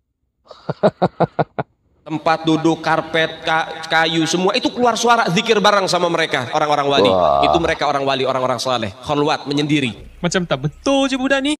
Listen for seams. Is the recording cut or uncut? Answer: cut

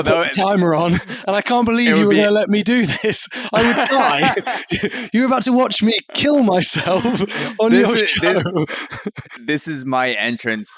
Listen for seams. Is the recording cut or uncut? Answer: cut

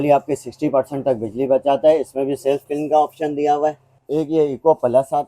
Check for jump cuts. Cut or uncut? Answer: cut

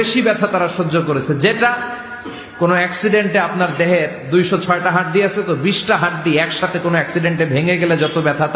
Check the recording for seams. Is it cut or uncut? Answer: uncut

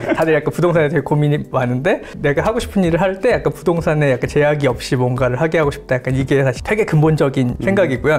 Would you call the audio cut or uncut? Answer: uncut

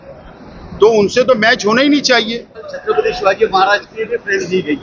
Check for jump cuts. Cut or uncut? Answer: cut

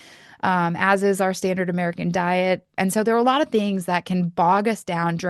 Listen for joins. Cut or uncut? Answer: cut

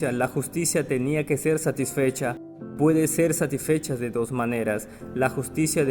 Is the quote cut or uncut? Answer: uncut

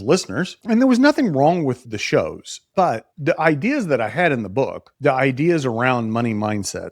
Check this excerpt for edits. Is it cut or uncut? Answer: cut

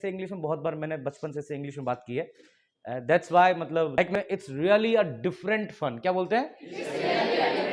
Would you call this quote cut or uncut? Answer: cut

